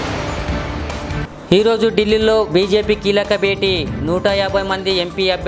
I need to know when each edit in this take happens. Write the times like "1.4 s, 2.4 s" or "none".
none